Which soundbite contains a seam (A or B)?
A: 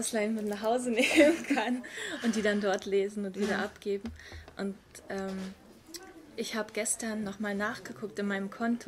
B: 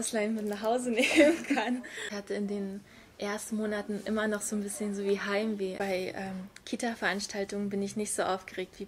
B